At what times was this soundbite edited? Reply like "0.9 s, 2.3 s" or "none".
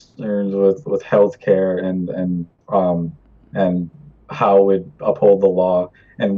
1.5 s